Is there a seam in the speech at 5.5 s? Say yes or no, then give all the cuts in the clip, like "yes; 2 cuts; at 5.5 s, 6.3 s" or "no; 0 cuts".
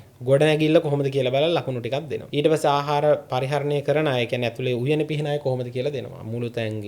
no; 1 cut; at 2.2 s